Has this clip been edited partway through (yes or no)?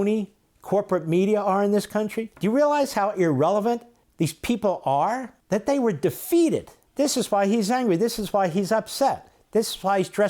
yes